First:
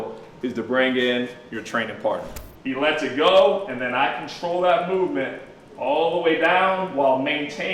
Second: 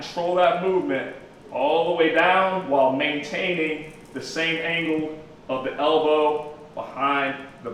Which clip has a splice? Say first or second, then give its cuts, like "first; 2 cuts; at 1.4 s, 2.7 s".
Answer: first; 1 cut; at 2.3 s